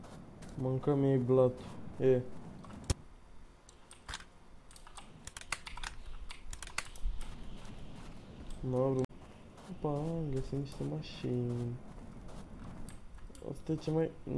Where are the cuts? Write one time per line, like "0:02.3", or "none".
0:09.1